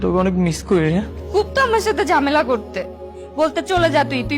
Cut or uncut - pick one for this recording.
cut